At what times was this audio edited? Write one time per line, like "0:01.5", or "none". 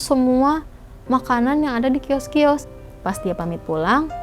0:02.7